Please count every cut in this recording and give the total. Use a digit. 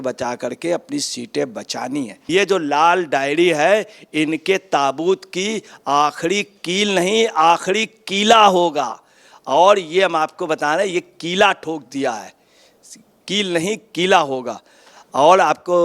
1